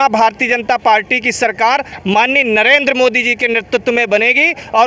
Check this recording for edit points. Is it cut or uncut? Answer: uncut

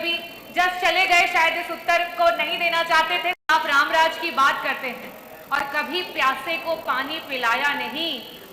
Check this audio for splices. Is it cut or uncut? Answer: cut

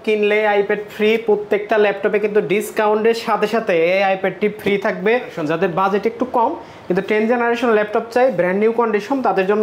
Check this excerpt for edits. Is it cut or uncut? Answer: cut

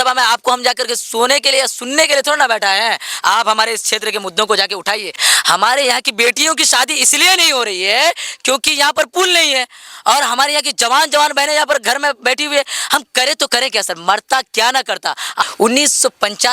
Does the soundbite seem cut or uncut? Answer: cut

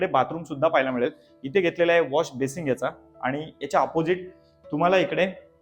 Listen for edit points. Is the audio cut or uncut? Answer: uncut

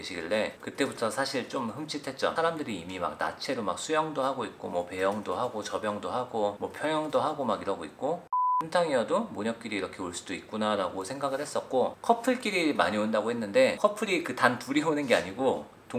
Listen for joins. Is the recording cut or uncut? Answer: cut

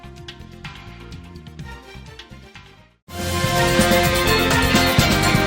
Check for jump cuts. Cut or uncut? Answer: cut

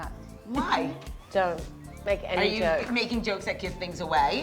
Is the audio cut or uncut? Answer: cut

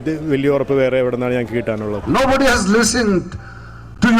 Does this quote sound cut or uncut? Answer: cut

